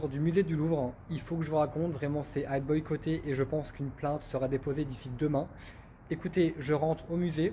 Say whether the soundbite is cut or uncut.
cut